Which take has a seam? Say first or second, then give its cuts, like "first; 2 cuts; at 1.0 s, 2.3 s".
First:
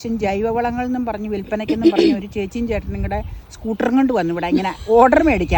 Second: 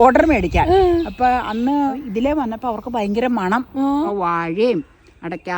second; 2 cuts; at 1.9 s, 4.1 s